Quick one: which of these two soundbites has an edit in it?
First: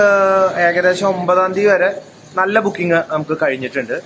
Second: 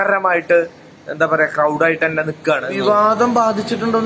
second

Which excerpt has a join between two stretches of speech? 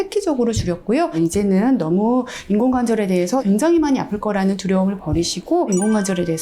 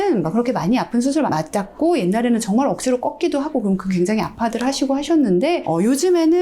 first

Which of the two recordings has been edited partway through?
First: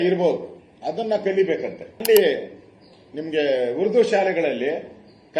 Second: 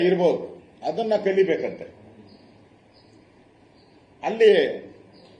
first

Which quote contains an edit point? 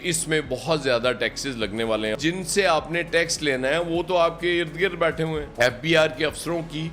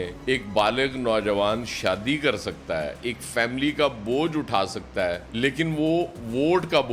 first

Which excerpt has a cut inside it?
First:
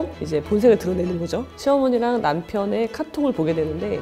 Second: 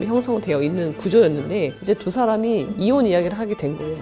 first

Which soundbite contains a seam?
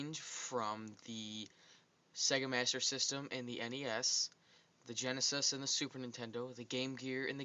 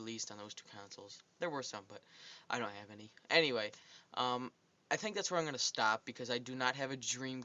first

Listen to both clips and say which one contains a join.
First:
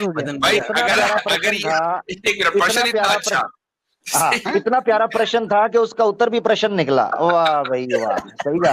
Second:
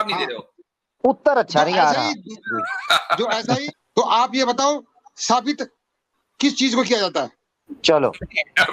second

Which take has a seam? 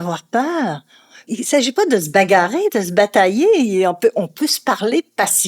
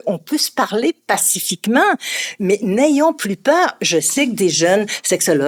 first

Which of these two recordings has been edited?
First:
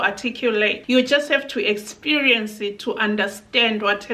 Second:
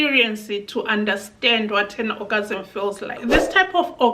second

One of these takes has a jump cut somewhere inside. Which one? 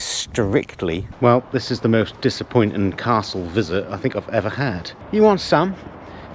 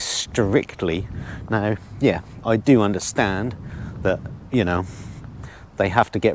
first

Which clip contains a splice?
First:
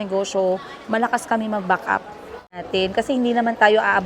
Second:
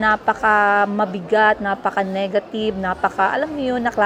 first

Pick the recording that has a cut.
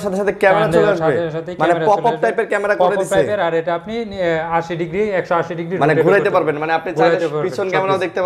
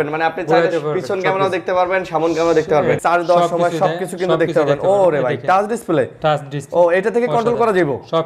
second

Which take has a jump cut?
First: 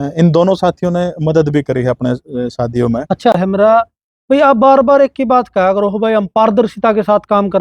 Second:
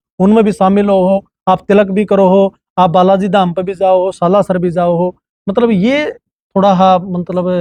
first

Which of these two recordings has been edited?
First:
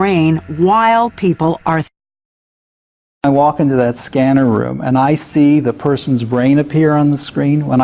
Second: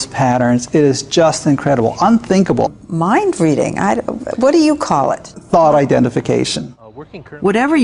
first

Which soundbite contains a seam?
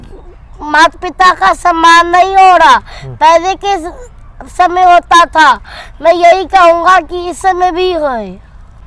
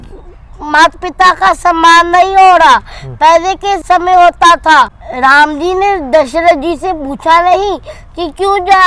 second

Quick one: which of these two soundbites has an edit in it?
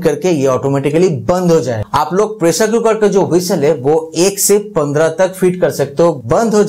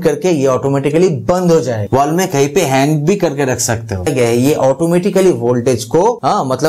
second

